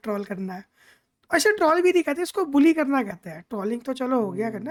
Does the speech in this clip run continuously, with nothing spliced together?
yes; 0 cuts

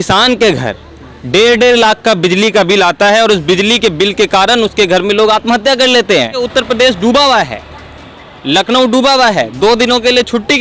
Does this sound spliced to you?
yes; 1 cut; at 6.4 s

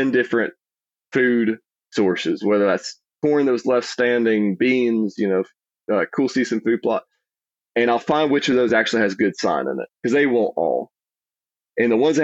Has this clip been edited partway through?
no; 0 cuts

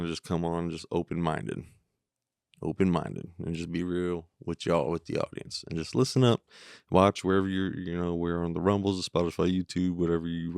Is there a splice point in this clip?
no; 0 cuts

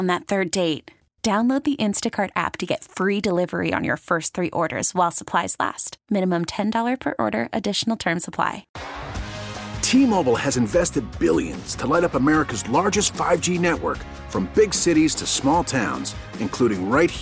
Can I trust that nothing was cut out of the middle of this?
no; 1 cut; at 8.7 s

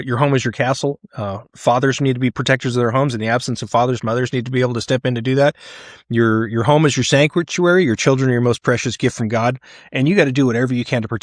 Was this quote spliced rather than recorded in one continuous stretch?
no; 0 cuts

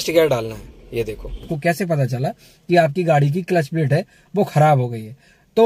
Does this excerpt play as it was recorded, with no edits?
no; 1 cut; at 1.5 s

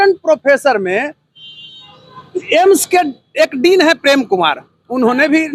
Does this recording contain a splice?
no; 0 cuts

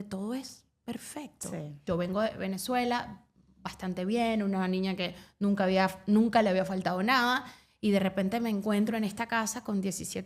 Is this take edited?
yes; 1 cut; at 1.8 s

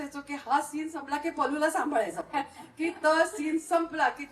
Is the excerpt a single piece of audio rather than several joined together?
yes; 0 cuts

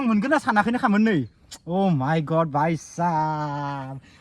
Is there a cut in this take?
no; 0 cuts

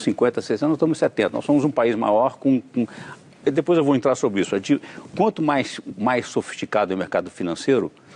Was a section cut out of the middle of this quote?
no; 0 cuts

